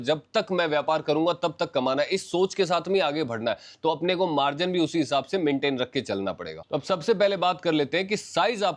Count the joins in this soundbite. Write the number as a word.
zero